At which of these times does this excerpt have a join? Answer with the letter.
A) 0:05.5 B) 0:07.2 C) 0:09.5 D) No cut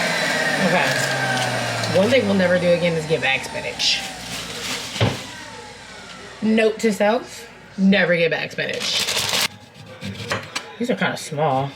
C